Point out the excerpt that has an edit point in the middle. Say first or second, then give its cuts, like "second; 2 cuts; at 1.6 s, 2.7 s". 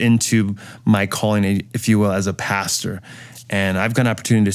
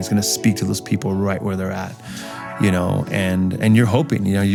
first; 1 cut; at 1.7 s